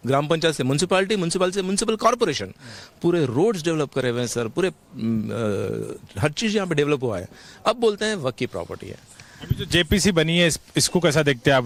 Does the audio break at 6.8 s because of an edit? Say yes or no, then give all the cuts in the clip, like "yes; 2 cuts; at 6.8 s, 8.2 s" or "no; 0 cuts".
no; 0 cuts